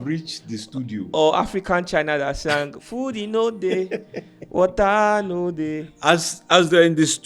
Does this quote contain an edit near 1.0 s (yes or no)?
no